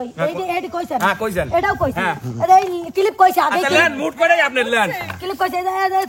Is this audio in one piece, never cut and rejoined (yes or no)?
yes